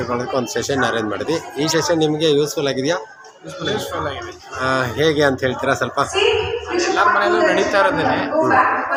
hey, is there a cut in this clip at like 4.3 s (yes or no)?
no